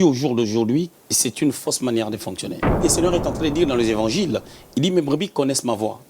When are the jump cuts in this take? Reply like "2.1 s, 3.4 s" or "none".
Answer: 1.0 s, 2.8 s